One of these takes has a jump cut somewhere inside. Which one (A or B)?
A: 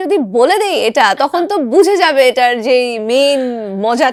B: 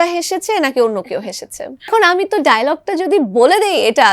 B